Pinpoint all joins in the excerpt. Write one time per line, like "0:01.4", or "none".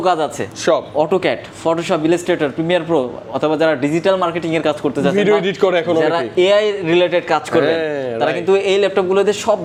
none